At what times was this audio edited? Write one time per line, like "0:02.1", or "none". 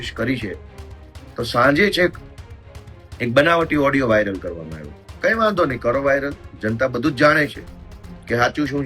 none

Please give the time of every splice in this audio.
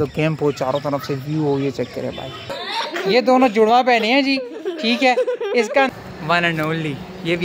0:02.6
0:05.9

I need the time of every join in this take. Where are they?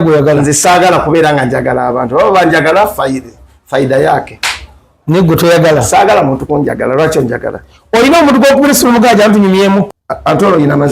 0:10.0

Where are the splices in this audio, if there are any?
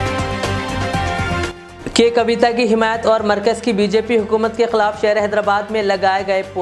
0:01.4

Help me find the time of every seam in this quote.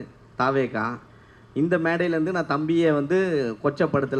none

